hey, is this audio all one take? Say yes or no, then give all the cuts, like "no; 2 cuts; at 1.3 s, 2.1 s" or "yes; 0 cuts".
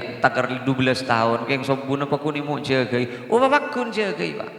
yes; 0 cuts